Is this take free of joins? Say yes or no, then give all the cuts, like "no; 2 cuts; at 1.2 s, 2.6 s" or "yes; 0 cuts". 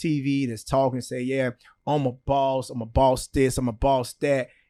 yes; 0 cuts